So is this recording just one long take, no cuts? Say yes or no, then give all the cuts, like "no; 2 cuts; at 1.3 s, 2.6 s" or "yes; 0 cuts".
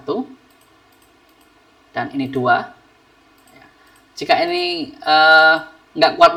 yes; 0 cuts